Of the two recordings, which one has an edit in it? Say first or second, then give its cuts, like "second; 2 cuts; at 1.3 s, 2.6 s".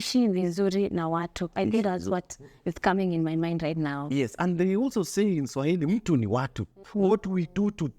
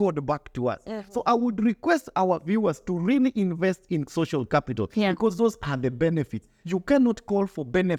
first; 1 cut; at 6.8 s